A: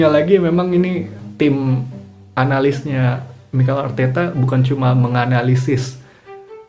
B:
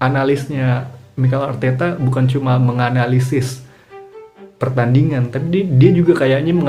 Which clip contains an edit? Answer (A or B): A